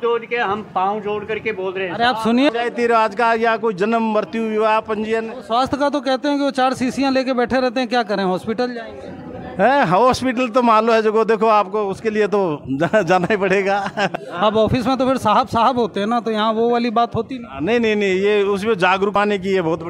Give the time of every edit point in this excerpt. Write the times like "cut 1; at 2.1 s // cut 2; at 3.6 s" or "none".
cut 1; at 2.5 s // cut 2; at 14.1 s // cut 3; at 19.1 s